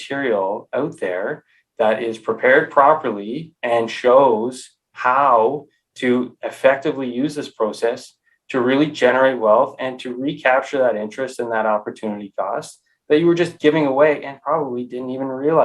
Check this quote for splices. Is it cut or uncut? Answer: uncut